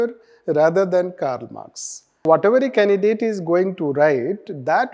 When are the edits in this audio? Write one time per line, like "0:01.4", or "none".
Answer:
0:02.3